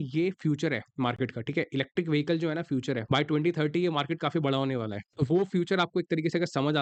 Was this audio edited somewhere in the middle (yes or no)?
no